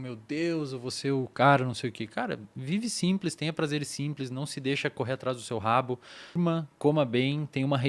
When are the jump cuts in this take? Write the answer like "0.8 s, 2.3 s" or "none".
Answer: 6.4 s